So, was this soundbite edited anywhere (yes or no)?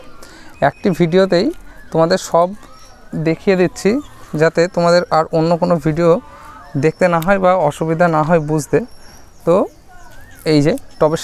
no